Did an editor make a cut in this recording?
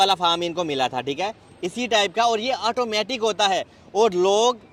no; 0 cuts

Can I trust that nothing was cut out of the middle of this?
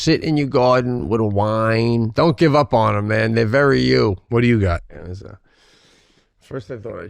no; 2 cuts; at 2.1 s, 4.2 s

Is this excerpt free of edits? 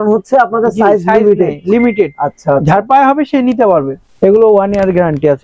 no; 1 cut; at 4.0 s

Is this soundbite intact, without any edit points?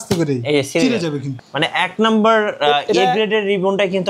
no; 1 cut; at 1.3 s

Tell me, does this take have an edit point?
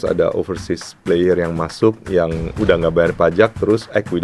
yes; 1 cut; at 2.6 s

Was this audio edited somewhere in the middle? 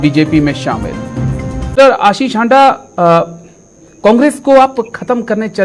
yes; 1 cut; at 1.7 s

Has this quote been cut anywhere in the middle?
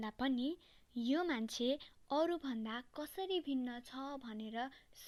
no; 0 cuts

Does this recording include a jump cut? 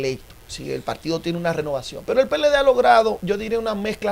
yes; 2 cuts; at 1.9 s, 3.2 s

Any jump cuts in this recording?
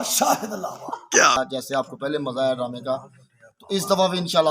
yes; 1 cut; at 1.4 s

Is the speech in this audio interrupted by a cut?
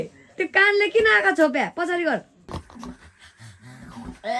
yes; 1 cut; at 2.5 s

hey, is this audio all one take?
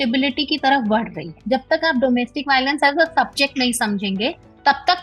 no; 1 cut; at 1.3 s

